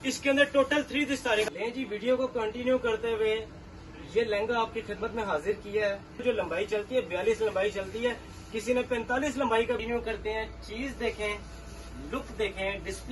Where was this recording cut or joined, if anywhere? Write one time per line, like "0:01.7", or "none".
0:01.5
0:06.2
0:09.8